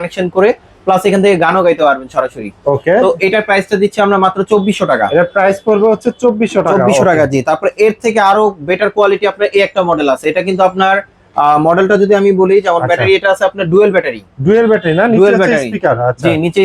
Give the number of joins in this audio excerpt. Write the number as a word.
zero